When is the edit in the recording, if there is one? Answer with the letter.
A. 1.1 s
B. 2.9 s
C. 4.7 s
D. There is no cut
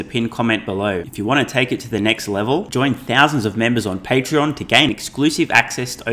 A